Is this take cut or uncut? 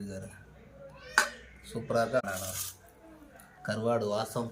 cut